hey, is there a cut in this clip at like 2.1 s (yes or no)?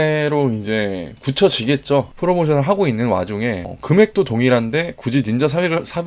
yes